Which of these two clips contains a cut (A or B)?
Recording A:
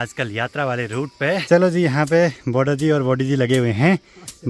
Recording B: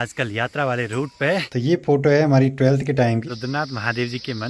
B